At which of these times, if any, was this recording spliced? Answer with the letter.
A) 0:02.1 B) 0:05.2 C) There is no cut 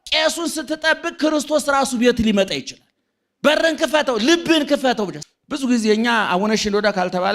B